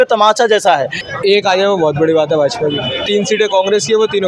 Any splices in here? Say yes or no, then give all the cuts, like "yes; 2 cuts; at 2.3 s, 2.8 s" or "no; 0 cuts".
yes; 2 cuts; at 1.0 s, 3.1 s